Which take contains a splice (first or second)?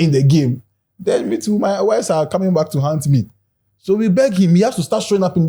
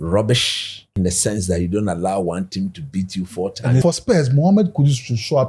second